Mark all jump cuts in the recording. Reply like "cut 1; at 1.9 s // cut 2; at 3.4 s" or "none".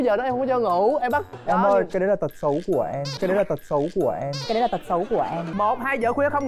cut 1; at 1.3 s // cut 2; at 5.5 s